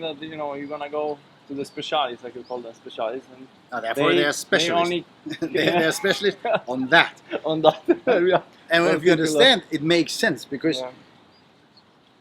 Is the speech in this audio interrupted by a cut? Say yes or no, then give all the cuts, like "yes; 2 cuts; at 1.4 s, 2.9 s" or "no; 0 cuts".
no; 0 cuts